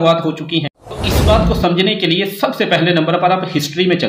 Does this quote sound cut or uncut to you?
cut